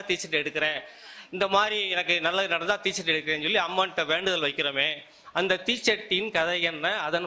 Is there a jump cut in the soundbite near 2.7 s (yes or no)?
no